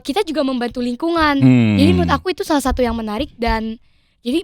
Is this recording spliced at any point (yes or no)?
no